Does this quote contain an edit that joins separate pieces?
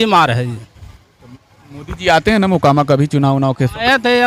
no; 0 cuts

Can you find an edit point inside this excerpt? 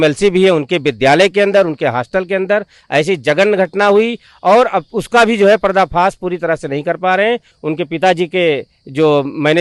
no; 0 cuts

